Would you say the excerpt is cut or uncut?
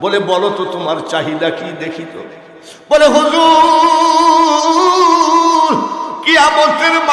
cut